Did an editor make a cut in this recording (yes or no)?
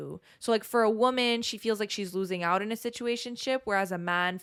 no